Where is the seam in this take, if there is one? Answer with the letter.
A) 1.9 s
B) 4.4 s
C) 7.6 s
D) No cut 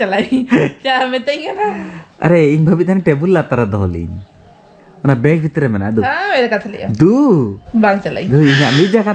C